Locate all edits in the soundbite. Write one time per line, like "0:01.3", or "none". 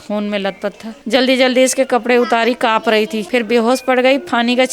0:00.9
0:03.2

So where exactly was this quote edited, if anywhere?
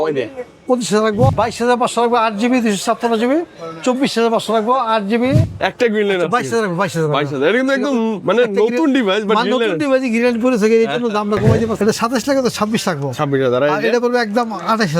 0:01.3
0:05.6
0:11.7

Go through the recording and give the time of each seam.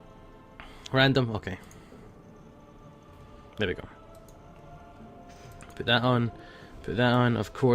0:01.5

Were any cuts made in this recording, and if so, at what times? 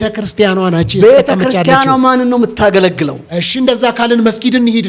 0:03.2

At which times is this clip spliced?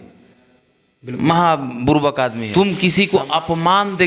0:02.4

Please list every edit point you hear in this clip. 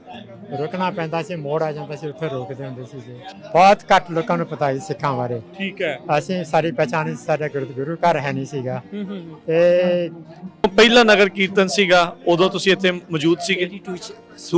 0:03.2
0:10.6

